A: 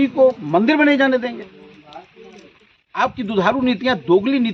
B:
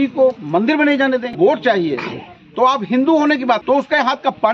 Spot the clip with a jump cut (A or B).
B